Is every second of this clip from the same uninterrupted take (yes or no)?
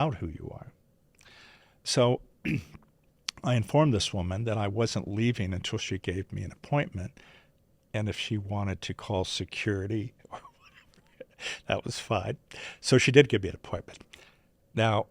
yes